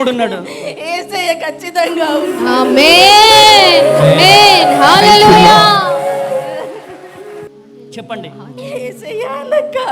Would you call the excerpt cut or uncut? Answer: cut